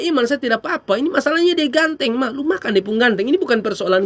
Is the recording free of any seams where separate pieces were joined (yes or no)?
yes